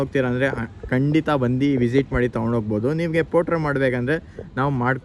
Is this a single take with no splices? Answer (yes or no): yes